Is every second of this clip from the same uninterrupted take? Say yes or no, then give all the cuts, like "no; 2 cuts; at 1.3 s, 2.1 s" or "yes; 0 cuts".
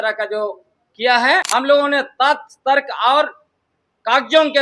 no; 1 cut; at 1.5 s